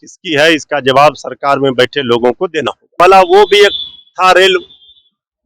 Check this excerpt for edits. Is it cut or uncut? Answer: cut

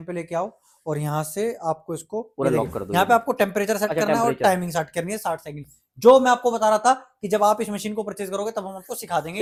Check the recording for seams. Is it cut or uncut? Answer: uncut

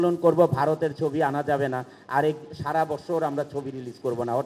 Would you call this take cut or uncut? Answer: uncut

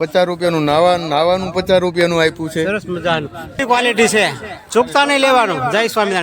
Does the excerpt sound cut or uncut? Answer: cut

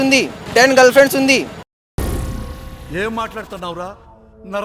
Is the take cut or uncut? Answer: uncut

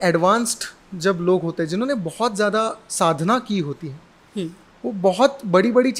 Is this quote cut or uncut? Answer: uncut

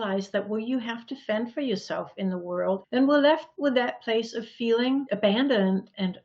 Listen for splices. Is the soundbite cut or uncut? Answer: cut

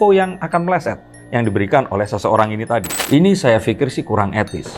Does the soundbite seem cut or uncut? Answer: cut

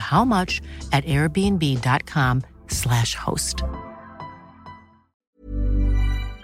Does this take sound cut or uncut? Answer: cut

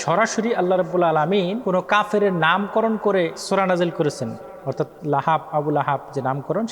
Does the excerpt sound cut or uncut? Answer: cut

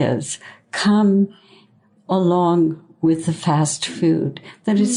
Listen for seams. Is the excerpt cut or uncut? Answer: uncut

